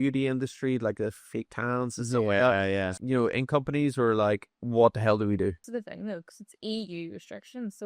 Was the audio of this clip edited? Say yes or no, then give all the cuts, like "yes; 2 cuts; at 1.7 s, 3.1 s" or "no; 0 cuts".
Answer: yes; 3 cuts; at 2.9 s, 4.5 s, 5.6 s